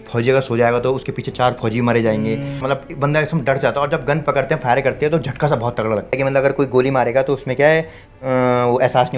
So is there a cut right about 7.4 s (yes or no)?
no